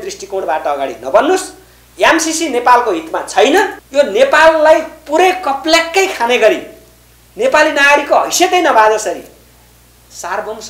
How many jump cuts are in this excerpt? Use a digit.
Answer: 1